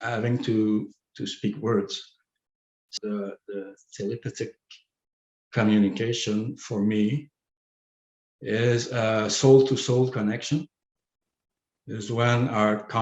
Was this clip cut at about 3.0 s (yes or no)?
yes